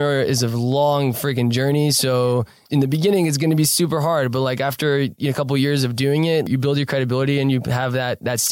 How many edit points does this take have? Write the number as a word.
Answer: two